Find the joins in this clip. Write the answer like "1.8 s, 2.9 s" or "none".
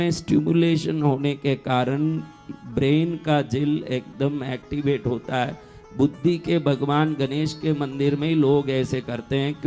none

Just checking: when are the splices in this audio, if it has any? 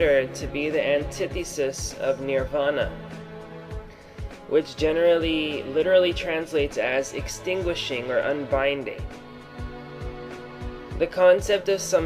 11.1 s

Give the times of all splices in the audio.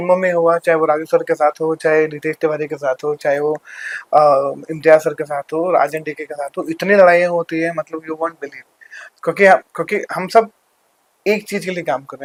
none

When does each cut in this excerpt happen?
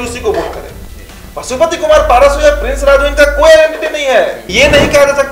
4.4 s

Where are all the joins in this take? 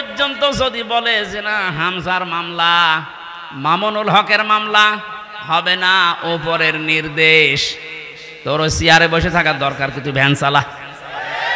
none

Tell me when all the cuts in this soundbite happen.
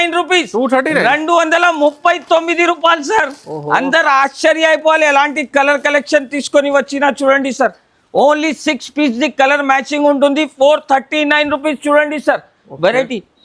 none

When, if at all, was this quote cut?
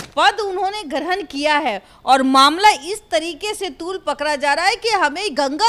none

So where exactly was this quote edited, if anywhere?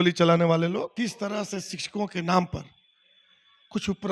0.9 s

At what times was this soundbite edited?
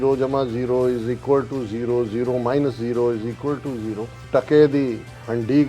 4.1 s

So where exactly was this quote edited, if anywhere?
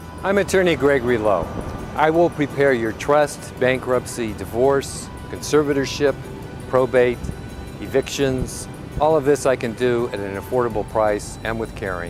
none

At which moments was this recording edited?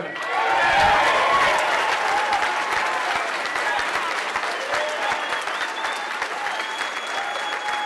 6.5 s

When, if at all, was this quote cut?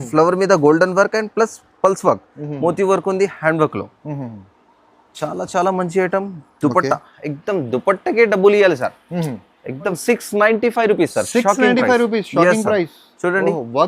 10.0 s

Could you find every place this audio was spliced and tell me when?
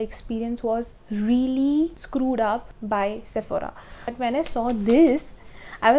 1.0 s, 2.0 s, 2.7 s, 4.1 s

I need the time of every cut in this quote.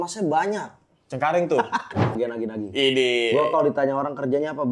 2.1 s

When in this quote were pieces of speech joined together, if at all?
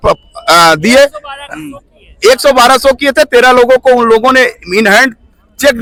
none

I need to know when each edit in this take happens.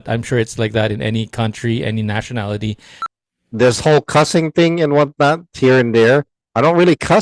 3.0 s

